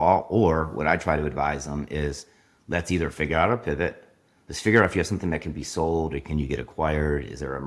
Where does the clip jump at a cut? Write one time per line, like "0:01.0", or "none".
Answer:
none

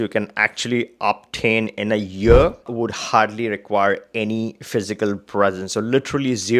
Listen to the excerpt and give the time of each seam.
0:02.7

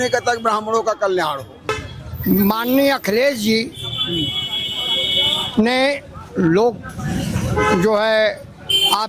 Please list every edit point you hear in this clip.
0:01.7

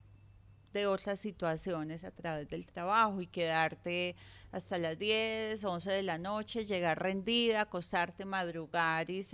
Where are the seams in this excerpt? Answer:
none

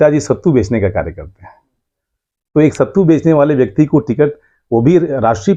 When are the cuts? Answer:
none

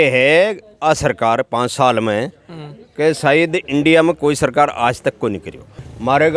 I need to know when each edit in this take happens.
none

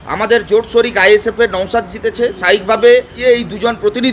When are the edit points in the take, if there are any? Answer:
0:03.1

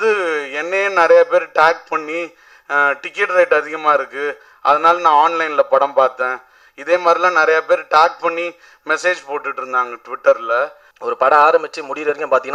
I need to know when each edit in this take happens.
0:10.8

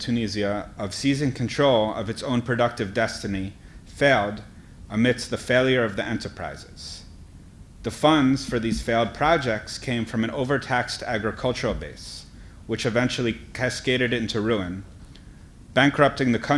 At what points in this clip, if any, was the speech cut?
0:08.1

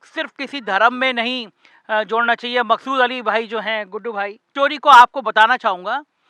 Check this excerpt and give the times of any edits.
0:04.4

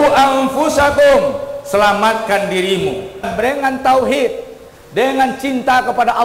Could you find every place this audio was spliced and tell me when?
0:03.3

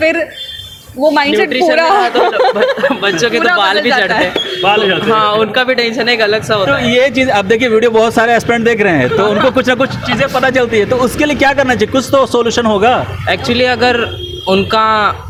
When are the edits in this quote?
none

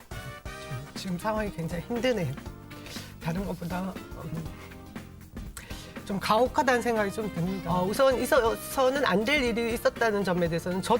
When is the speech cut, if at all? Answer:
0:07.6

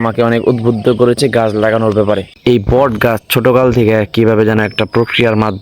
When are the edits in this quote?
0:02.3

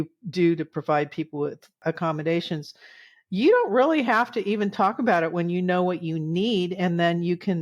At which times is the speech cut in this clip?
0:01.8

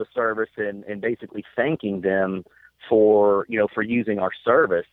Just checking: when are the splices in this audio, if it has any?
none

